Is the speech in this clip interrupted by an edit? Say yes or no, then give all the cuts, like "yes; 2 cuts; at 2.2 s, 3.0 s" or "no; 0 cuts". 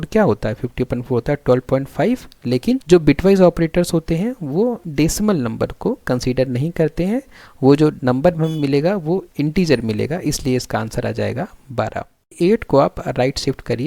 yes; 3 cuts; at 2.8 s, 4.8 s, 12.4 s